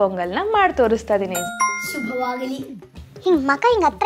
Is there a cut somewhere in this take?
yes; 2 cuts; at 1.7 s, 2.9 s

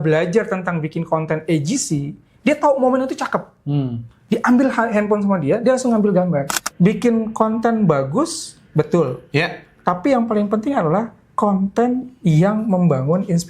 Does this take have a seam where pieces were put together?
yes; 1 cut; at 6.7 s

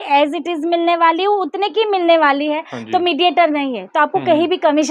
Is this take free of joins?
yes; 0 cuts

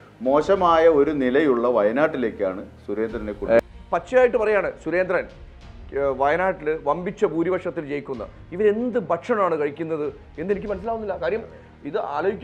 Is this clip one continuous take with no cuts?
no; 1 cut; at 3.6 s

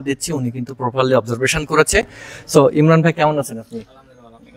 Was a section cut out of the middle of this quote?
no; 0 cuts

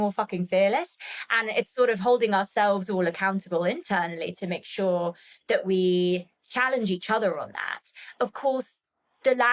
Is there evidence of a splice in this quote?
no; 0 cuts

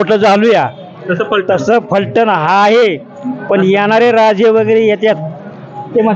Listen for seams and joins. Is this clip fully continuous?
yes; 0 cuts

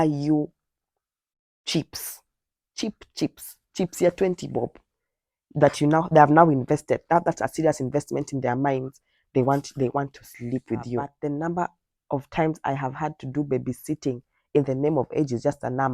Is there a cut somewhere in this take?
yes; 1 cut; at 11.1 s

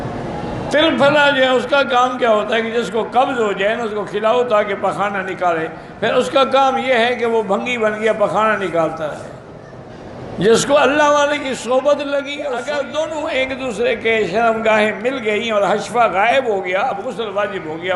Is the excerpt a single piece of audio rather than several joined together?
no; 1 cut; at 12.6 s

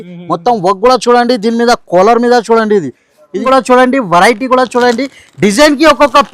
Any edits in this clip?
yes; 1 cut; at 3.4 s

